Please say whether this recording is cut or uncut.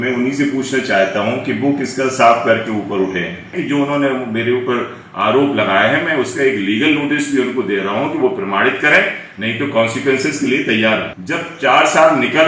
cut